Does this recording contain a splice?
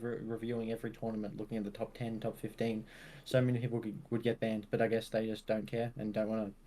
no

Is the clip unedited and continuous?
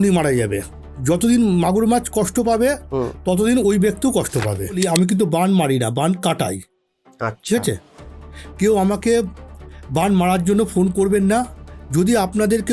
no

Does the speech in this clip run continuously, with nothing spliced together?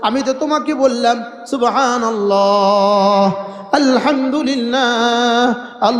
yes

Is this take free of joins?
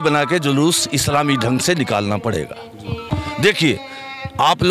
yes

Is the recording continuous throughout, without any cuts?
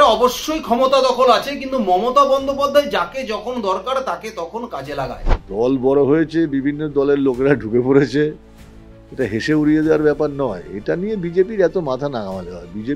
no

